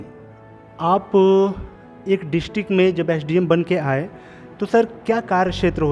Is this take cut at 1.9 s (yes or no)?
no